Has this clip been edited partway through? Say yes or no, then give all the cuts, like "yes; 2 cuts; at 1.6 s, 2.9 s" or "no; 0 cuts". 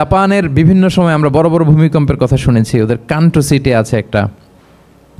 no; 0 cuts